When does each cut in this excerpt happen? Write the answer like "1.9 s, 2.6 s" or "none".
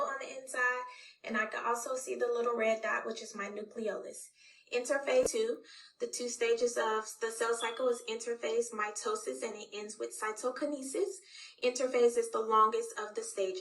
5.3 s